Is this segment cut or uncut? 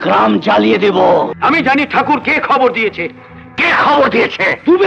cut